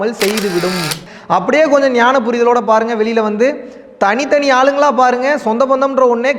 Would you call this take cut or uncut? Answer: cut